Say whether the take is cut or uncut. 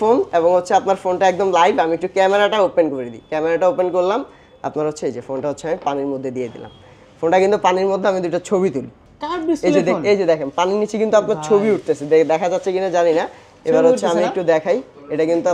uncut